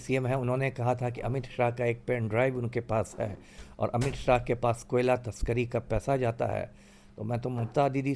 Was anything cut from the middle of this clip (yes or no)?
no